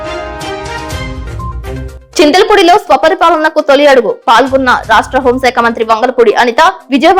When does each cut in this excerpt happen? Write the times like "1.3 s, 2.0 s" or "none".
1.8 s